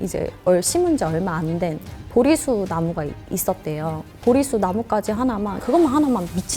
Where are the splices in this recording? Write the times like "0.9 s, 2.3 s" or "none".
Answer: 4.1 s, 5.6 s